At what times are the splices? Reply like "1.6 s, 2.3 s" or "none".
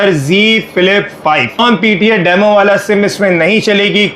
1.6 s